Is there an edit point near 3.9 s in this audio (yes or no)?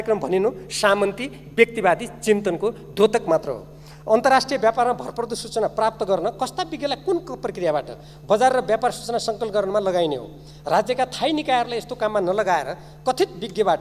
no